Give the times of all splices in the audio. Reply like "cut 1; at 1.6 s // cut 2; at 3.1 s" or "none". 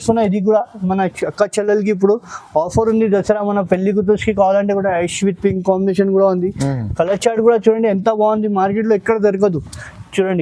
none